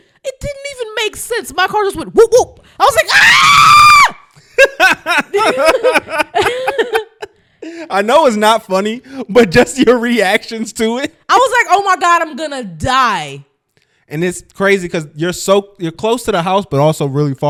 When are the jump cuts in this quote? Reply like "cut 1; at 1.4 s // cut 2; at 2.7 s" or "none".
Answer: none